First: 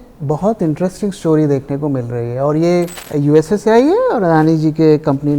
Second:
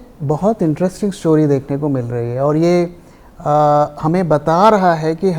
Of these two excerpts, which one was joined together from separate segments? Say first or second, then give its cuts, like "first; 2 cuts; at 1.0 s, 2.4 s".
first; 1 cut; at 3.0 s